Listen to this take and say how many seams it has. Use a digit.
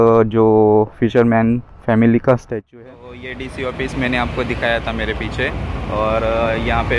1